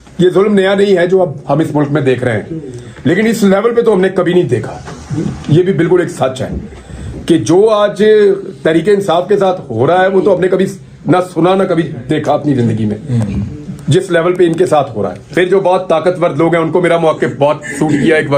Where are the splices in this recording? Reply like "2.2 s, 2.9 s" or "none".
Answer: 15.2 s